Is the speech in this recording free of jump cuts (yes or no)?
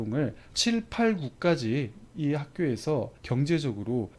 no